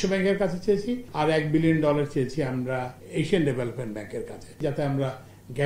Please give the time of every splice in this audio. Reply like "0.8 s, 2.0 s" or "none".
1.0 s, 3.0 s, 4.6 s